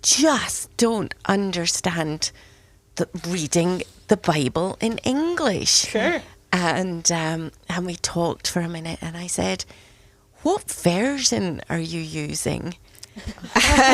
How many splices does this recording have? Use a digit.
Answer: 0